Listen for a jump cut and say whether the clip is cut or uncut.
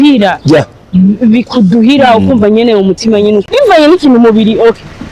cut